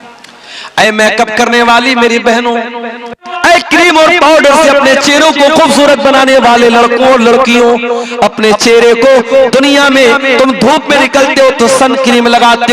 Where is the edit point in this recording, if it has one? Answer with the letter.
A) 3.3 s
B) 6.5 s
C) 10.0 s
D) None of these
A